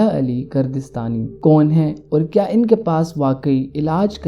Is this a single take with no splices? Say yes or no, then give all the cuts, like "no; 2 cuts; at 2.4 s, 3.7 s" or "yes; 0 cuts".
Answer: no; 1 cut; at 1.3 s